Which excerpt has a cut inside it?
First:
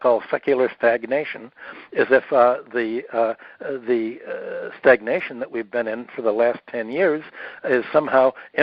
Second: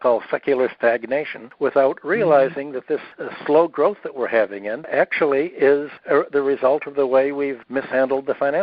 second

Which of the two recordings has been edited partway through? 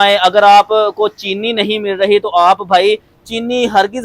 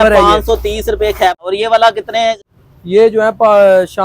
second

